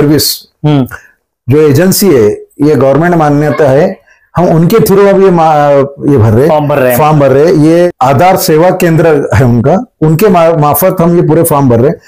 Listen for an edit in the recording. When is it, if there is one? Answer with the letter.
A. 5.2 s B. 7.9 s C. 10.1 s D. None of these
B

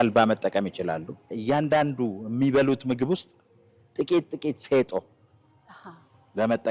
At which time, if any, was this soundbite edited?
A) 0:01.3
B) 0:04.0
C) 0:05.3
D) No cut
A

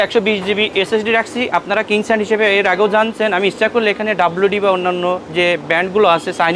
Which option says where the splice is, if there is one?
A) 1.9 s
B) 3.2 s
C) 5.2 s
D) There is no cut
D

